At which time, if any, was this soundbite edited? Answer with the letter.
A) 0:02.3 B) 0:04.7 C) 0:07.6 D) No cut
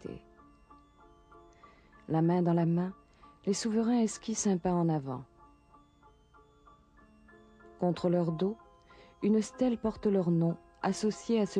A